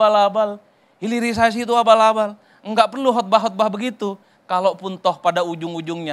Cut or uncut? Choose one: uncut